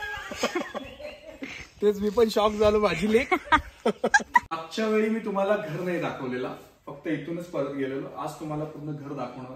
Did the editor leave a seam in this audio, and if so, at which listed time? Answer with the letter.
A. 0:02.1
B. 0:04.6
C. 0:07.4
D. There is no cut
B